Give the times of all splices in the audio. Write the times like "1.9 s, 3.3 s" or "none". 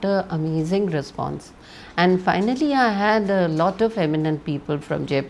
none